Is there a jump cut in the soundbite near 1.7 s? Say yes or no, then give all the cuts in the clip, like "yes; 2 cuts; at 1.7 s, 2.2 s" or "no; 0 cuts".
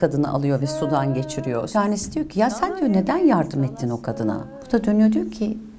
yes; 2 cuts; at 1.7 s, 4.5 s